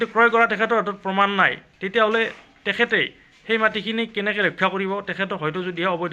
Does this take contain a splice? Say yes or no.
no